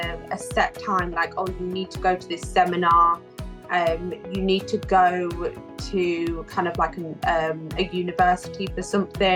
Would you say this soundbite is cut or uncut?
uncut